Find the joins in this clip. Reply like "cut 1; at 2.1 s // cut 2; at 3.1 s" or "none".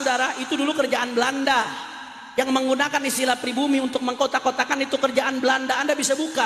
none

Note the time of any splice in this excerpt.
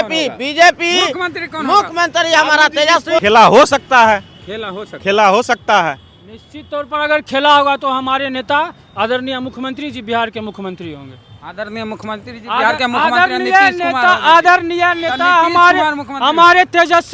cut 1; at 3.2 s

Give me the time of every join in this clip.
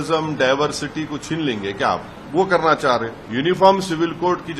cut 1; at 2.2 s // cut 2; at 3.2 s

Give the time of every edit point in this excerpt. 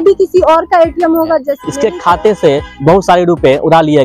cut 1; at 1.6 s

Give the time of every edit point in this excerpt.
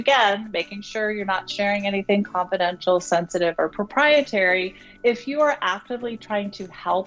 cut 1; at 3.8 s

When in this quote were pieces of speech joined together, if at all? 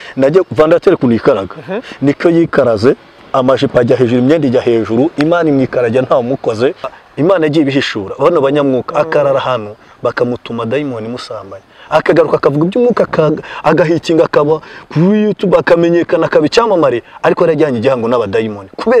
cut 1; at 7.0 s

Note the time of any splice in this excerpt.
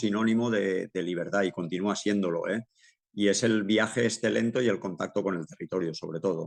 none

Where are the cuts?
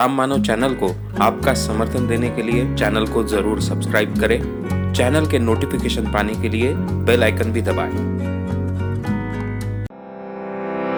none

